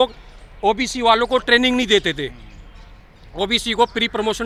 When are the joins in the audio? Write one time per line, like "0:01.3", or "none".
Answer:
none